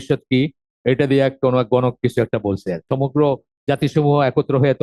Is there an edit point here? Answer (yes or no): yes